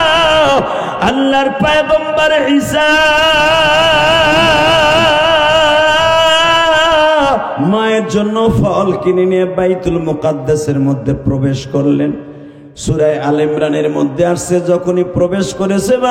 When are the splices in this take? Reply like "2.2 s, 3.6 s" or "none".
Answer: 7.5 s